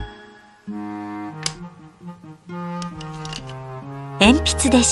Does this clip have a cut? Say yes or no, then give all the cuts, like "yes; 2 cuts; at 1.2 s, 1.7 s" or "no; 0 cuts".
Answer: no; 0 cuts